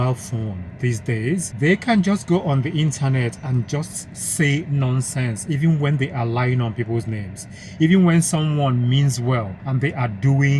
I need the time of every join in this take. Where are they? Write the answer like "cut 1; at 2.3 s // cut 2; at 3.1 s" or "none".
none